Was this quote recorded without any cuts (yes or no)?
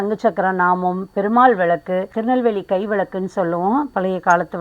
no